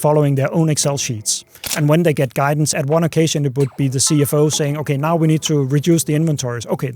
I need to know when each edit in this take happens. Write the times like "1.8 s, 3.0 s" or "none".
1.7 s, 2.7 s